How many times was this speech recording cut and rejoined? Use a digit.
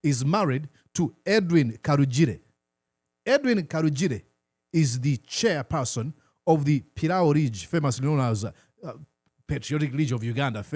0